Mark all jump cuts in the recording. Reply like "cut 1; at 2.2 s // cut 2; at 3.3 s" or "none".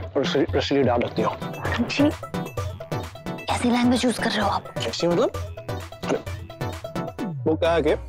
cut 1; at 1.5 s